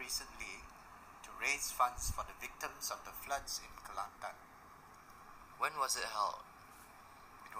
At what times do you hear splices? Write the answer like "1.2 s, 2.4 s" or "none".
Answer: 4.9 s